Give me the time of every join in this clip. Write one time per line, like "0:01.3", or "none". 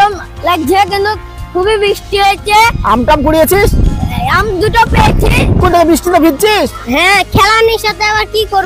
0:05.6